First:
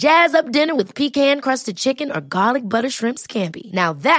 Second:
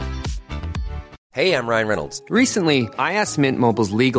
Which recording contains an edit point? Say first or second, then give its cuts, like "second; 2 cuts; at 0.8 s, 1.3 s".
second; 1 cut; at 1.2 s